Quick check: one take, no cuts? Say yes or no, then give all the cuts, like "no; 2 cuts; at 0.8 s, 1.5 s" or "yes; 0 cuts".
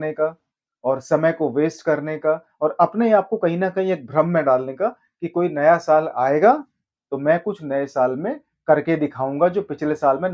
yes; 0 cuts